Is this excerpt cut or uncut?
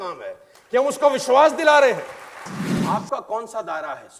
cut